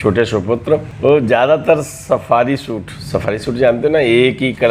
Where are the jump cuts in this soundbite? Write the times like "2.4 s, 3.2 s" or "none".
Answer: 0.9 s